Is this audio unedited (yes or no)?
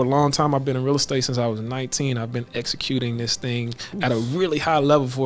yes